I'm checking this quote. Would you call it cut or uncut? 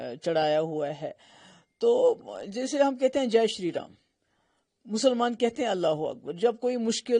uncut